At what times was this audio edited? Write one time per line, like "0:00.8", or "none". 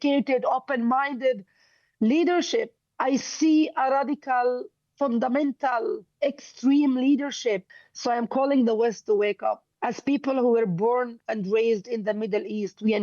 0:02.8
0:07.7
0:09.7